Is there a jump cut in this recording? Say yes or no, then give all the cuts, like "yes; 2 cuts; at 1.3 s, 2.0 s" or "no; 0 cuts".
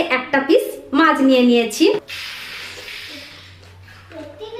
yes; 1 cut; at 2.1 s